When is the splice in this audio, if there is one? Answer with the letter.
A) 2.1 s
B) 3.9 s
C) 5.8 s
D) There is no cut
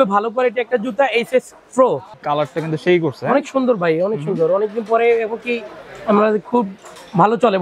A